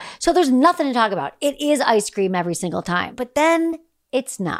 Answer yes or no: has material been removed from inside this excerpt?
yes